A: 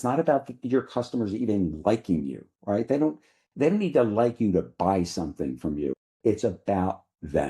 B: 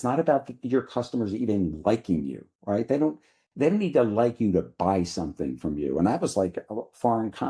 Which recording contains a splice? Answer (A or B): A